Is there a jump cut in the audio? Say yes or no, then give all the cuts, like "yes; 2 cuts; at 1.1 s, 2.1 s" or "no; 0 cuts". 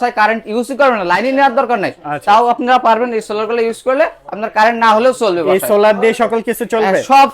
no; 0 cuts